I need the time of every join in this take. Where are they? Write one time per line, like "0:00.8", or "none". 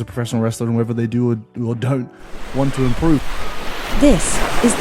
0:03.3